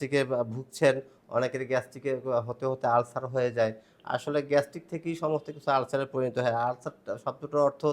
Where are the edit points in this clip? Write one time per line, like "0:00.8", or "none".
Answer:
none